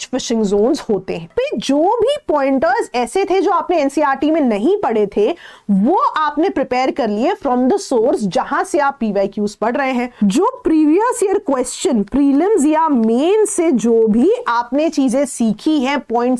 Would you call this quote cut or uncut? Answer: cut